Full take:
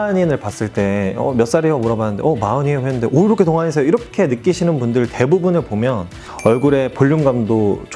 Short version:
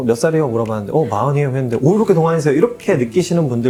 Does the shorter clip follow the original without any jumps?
yes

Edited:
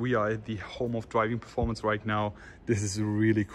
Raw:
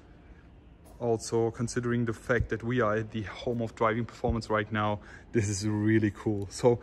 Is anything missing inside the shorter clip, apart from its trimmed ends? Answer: no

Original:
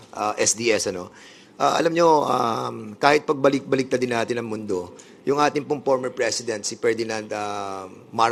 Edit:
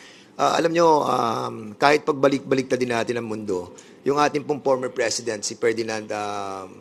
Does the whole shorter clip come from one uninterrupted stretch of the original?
yes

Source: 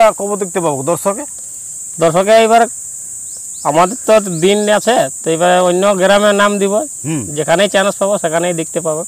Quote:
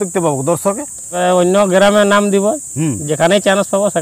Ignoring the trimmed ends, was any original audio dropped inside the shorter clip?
yes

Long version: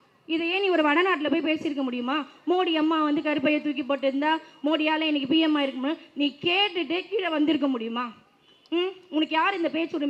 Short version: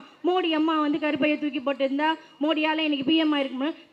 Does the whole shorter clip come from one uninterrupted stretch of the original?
yes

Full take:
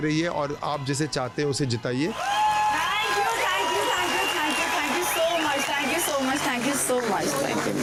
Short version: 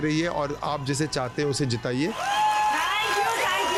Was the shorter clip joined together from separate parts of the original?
no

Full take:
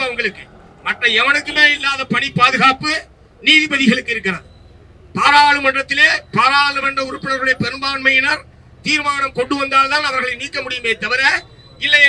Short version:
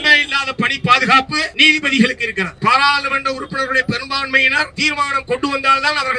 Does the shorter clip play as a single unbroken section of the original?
no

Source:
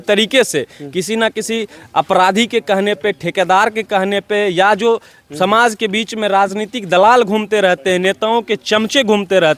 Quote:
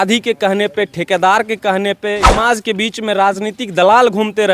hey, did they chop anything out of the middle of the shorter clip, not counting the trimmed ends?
yes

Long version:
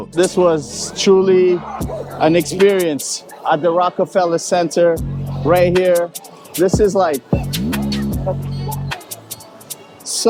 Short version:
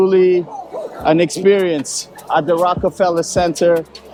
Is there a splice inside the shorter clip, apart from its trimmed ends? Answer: no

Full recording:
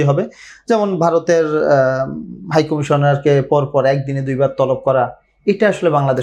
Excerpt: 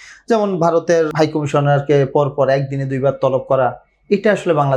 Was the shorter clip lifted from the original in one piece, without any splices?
no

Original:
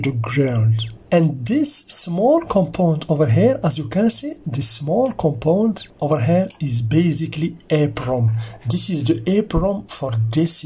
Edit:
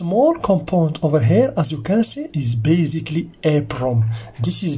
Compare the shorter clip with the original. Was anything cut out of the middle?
yes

